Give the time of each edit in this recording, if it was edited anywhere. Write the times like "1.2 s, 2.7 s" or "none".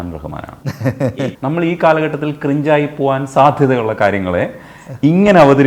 1.1 s